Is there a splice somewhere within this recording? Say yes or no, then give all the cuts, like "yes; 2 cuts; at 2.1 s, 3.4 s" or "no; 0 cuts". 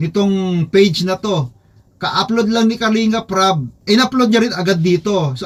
no; 0 cuts